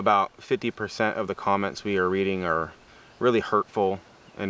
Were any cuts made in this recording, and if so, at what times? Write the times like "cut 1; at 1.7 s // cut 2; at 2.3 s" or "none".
none